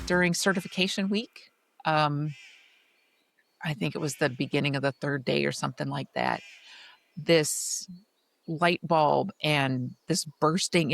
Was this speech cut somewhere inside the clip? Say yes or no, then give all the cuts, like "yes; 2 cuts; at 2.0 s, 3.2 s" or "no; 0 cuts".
no; 0 cuts